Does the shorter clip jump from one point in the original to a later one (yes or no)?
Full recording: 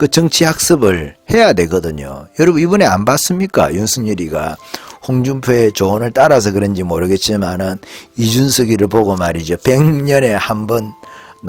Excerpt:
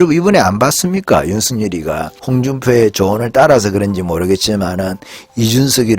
yes